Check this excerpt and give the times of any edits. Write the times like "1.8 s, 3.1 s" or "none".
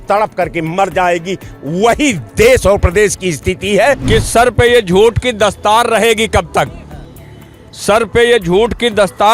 4.0 s